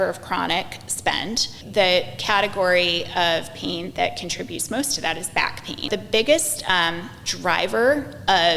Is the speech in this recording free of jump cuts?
no; 2 cuts; at 1.6 s, 5.9 s

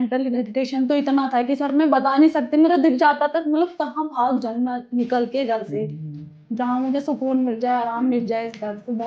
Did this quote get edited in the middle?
no; 0 cuts

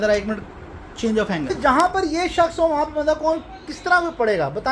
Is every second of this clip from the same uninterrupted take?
no; 1 cut; at 1.5 s

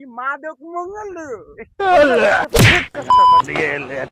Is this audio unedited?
yes; 0 cuts

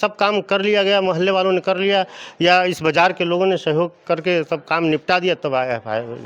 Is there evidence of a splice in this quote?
no; 0 cuts

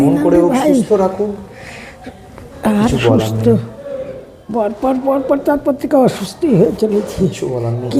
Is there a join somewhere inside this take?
no; 0 cuts

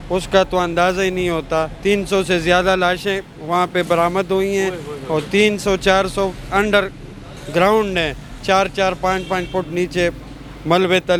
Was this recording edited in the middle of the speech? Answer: no; 0 cuts

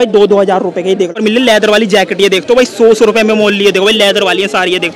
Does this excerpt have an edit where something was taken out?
yes; 1 cut; at 1.1 s

